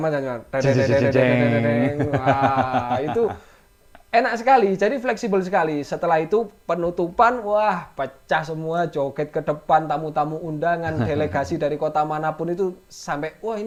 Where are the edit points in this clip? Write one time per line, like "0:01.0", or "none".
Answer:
none